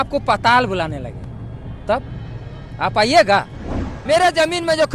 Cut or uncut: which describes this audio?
cut